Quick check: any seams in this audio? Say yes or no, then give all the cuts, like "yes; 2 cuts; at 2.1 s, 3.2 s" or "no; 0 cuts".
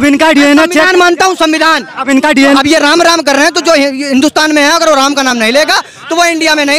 no; 0 cuts